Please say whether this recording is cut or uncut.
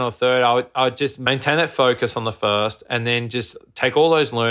cut